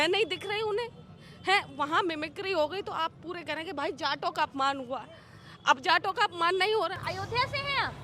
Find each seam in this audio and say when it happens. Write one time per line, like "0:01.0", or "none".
0:07.0